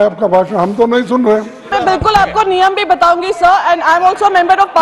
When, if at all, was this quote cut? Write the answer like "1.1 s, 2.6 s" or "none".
1.7 s